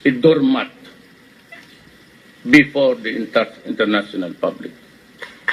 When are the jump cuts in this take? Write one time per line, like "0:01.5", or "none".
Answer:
0:01.1